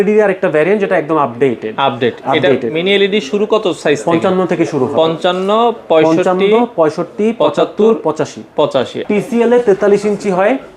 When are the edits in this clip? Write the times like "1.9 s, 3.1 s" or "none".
9.0 s